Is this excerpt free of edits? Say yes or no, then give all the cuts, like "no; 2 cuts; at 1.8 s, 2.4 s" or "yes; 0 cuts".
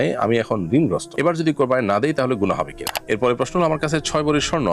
no; 1 cut; at 2.9 s